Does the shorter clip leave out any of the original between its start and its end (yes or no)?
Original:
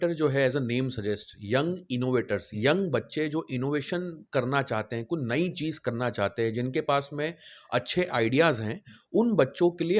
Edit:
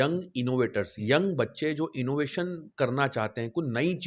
no